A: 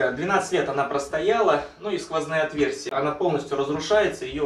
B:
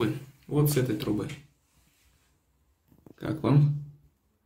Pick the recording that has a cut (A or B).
A